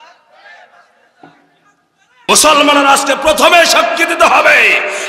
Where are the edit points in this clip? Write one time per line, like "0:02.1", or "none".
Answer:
0:02.1

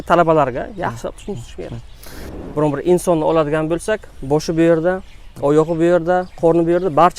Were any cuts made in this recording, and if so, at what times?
0:02.3

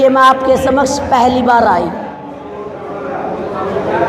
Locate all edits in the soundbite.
0:02.3

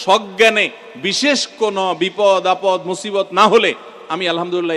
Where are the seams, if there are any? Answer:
none

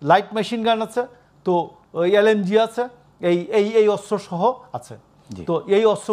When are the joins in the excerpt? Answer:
none

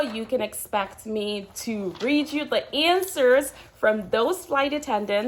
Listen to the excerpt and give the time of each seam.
none

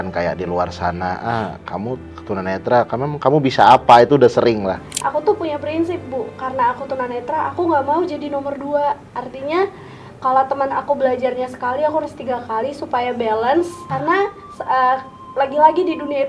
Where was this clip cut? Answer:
0:02.1
0:04.9
0:13.9
0:15.2

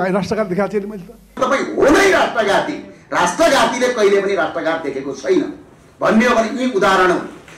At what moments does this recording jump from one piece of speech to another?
0:01.3

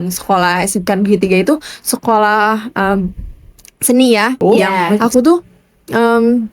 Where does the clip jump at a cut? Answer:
0:05.0

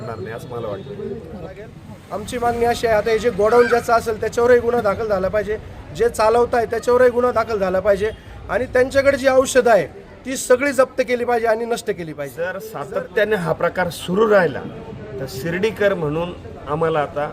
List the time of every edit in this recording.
0:01.6
0:12.7

